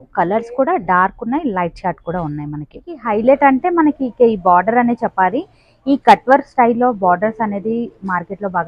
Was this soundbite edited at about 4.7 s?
no; 1 cut; at 3.0 s

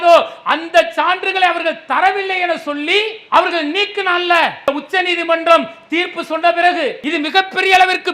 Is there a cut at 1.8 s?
no; 2 cuts; at 4.7 s, 7.0 s

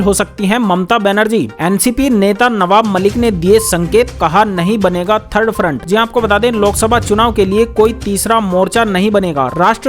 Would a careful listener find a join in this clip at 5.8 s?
no; 0 cuts

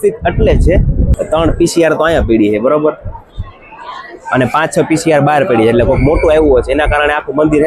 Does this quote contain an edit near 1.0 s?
yes; 1 cut; at 1.0 s

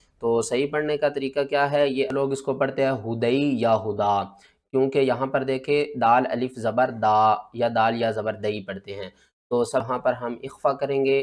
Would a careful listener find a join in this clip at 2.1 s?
yes; 2 cuts; at 2.1 s, 9.9 s

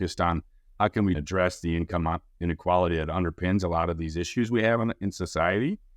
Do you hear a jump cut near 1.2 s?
yes; 1 cut; at 1.2 s

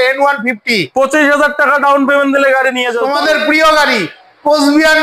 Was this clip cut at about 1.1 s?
no; 1 cut; at 2.9 s

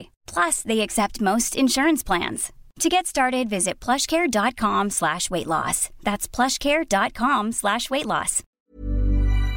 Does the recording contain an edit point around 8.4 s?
yes; 1 cut; at 8.4 s

